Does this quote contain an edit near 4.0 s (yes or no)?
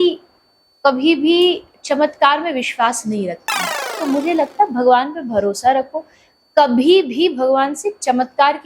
yes